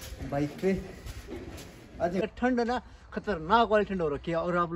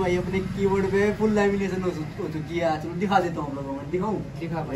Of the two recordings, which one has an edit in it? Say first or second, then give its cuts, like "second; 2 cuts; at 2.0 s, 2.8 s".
first; 1 cut; at 2.2 s